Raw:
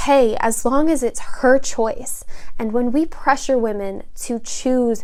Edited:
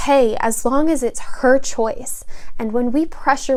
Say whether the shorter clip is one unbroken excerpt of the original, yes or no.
yes